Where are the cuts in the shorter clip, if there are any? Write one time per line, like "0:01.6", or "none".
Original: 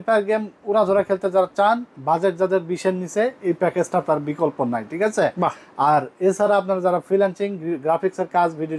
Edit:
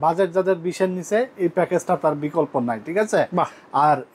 none